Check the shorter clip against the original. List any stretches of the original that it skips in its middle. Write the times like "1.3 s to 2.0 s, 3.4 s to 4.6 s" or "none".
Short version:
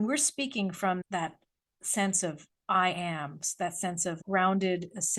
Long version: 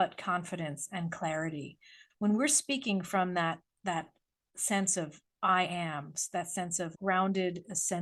3.3 s to 3.7 s